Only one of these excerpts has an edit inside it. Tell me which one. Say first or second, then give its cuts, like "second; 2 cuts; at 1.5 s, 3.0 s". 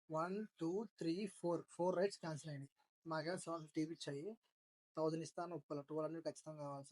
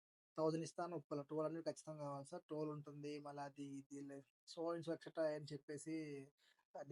first; 1 cut; at 2.9 s